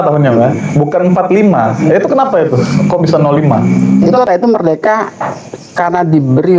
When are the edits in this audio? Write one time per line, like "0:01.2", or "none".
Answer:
0:04.3